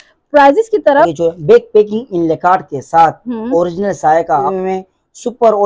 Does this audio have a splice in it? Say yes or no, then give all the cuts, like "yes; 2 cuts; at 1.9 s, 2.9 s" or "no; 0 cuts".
yes; 2 cuts; at 1.1 s, 4.5 s